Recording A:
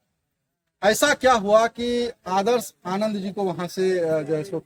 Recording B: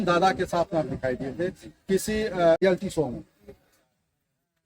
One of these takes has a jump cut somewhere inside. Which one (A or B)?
B